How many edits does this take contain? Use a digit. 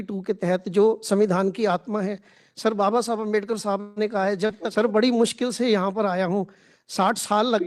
1